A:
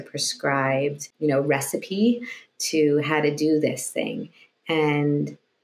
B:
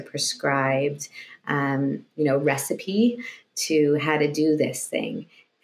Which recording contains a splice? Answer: A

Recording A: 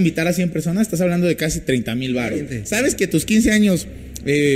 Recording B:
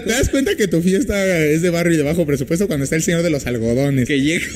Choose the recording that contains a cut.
A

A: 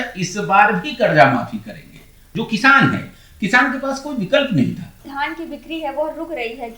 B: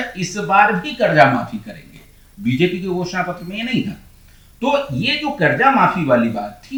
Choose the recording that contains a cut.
A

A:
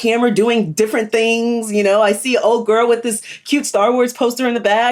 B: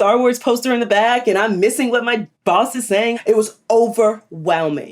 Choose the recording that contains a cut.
B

